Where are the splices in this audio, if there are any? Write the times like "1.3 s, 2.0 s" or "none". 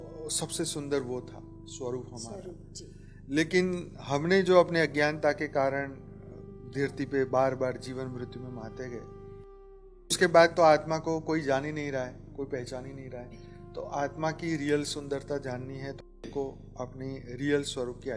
none

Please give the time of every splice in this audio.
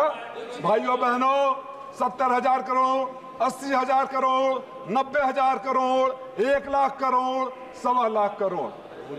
none

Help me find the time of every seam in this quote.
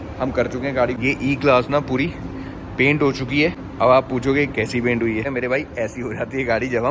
0.9 s, 3.6 s, 5.3 s

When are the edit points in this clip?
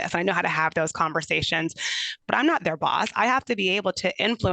2.1 s

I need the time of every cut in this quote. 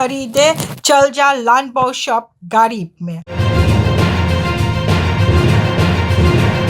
3.4 s

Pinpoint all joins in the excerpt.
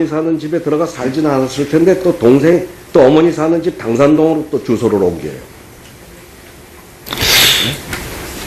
none

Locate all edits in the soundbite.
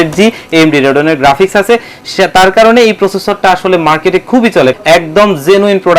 4.7 s

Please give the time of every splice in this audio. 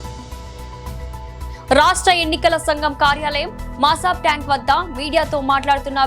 1.6 s

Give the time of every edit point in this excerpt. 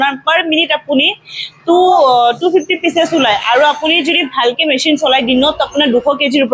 none

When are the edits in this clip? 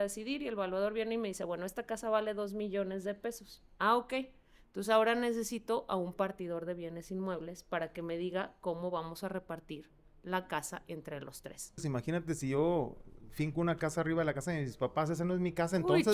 11.8 s

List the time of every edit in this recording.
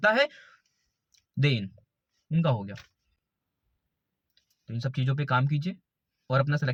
none

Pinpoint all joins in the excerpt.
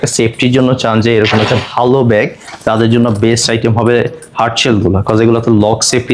none

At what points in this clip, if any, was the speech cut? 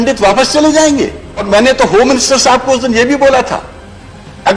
1.4 s

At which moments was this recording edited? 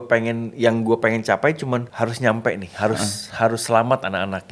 1.9 s

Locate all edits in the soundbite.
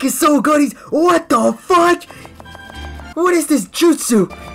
none

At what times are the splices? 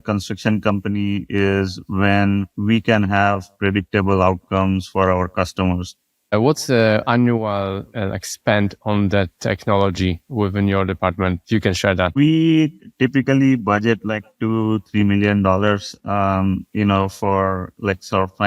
2.5 s, 6.3 s, 10.2 s, 11.8 s

